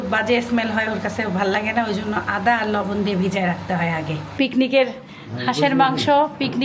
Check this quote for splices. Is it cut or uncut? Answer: cut